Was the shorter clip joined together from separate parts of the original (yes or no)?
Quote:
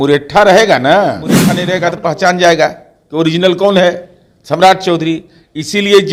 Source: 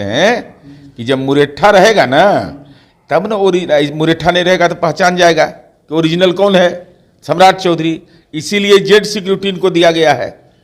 yes